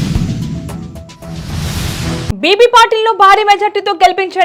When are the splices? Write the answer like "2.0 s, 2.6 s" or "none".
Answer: none